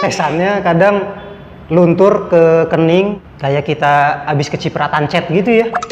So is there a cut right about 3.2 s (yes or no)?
yes